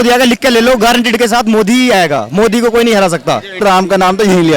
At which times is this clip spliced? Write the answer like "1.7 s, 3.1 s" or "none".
3.6 s